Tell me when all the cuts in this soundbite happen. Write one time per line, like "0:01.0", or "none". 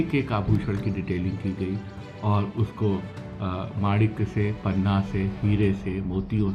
none